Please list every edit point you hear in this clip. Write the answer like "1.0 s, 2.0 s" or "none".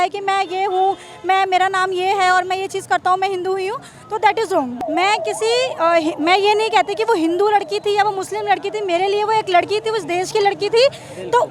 none